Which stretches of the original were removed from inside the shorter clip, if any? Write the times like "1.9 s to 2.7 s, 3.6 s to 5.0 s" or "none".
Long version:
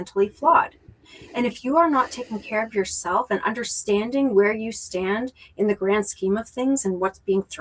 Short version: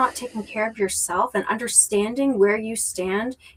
none